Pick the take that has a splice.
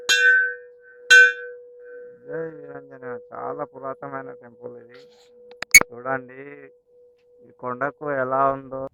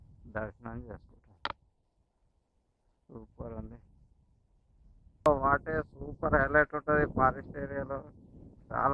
second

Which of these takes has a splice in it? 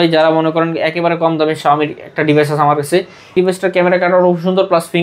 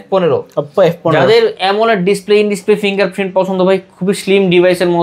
first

